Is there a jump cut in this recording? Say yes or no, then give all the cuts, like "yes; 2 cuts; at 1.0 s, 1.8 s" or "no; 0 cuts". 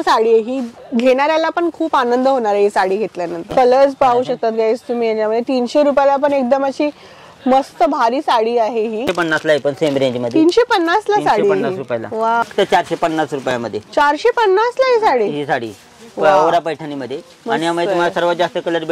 yes; 3 cuts; at 3.4 s, 9.1 s, 12.4 s